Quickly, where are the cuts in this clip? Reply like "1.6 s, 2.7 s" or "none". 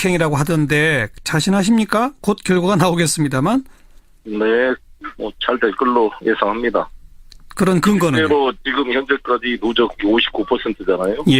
none